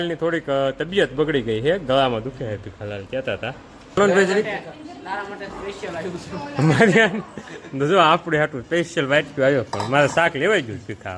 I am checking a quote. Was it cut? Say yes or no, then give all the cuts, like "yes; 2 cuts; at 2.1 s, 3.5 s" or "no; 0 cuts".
yes; 1 cut; at 4.0 s